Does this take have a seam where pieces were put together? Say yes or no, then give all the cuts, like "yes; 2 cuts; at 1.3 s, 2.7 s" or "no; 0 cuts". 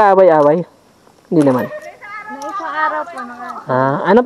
no; 0 cuts